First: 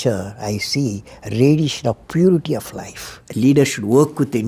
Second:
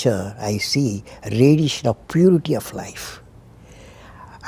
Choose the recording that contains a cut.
first; 1 cut; at 3.2 s

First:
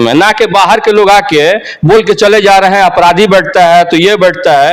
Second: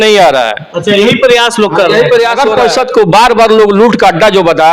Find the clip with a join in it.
second; 1 cut; at 2.4 s

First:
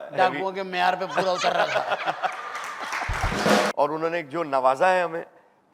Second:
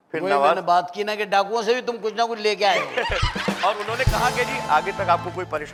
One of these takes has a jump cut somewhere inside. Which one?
first; 1 cut; at 3.7 s

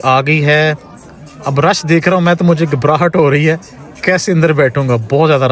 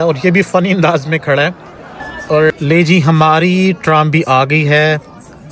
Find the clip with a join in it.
second; 1 cut; at 2.5 s

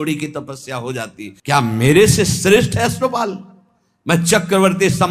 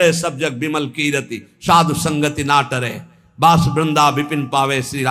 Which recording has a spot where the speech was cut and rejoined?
first; 1 cut; at 1.3 s

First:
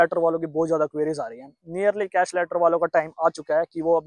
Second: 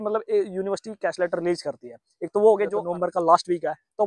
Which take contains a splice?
second; 1 cut; at 2.8 s

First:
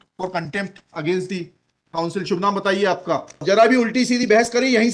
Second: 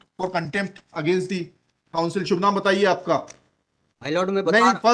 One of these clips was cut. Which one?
first; 1 cut; at 3.4 s

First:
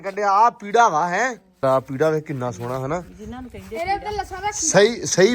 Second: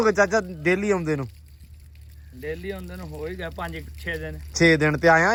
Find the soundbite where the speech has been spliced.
first; 1 cut; at 1.6 s

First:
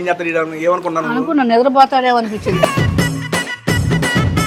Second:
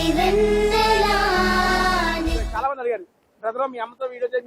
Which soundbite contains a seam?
second; 1 cut; at 2.4 s

